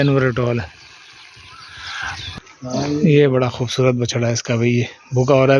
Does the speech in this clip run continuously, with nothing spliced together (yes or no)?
no